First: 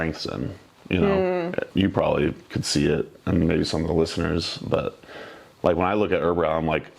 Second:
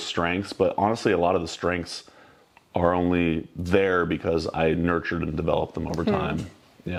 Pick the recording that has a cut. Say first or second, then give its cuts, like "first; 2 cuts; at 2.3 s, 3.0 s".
first; 1 cut; at 1.7 s